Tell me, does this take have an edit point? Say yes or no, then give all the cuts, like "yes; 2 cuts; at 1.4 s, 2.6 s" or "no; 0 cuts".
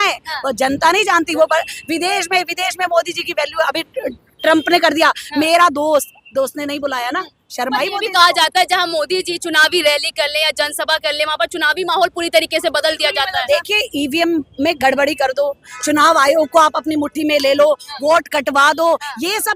no; 0 cuts